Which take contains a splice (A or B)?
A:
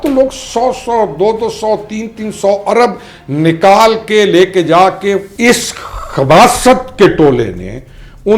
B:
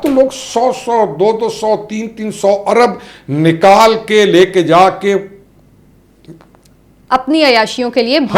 A